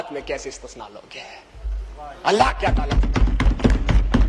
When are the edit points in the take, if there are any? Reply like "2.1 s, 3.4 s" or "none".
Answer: none

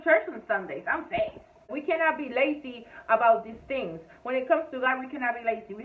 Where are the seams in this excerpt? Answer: 1.8 s

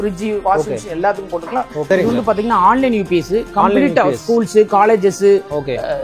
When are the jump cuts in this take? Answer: 1.8 s

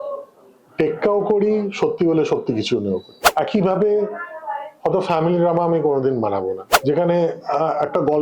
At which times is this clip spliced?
3.1 s, 6.7 s

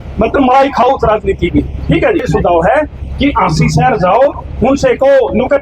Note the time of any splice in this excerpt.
2.2 s

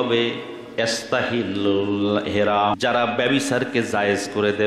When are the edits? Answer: 2.8 s

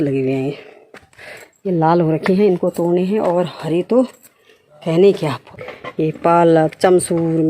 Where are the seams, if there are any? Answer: 5.4 s

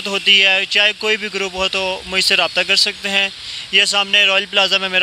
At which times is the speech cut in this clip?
none

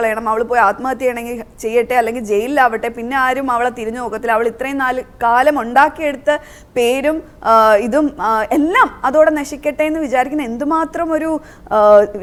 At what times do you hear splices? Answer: none

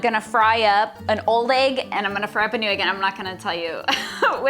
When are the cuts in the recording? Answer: 1.0 s

